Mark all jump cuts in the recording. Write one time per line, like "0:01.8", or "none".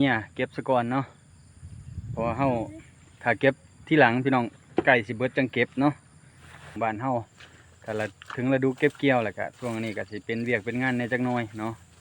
0:06.6